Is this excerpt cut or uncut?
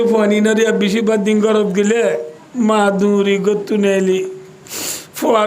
cut